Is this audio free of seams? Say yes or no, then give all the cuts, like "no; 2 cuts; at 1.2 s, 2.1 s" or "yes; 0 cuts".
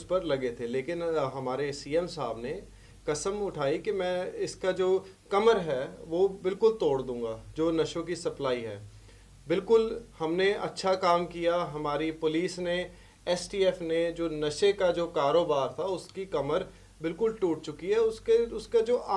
yes; 0 cuts